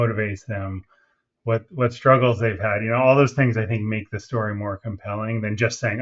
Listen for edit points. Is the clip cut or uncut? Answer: uncut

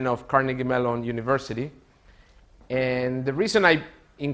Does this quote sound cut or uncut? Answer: cut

